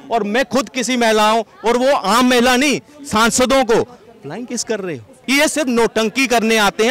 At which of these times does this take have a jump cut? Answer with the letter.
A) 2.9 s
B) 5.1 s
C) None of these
B